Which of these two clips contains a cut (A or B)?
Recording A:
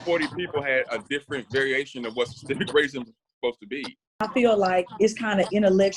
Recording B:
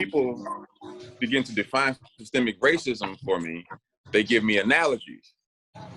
A